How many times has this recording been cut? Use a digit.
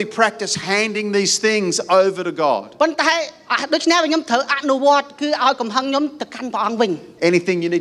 0